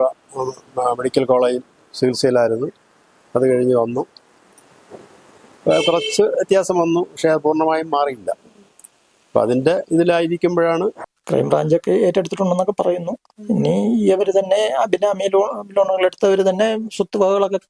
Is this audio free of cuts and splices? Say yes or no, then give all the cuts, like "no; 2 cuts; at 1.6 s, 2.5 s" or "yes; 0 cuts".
no; 1 cut; at 11.1 s